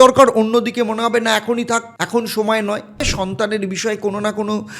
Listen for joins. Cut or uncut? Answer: cut